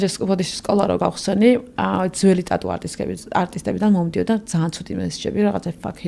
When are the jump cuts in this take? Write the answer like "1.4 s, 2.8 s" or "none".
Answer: none